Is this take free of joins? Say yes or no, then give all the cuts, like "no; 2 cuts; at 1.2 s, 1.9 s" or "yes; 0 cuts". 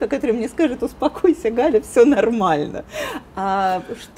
yes; 0 cuts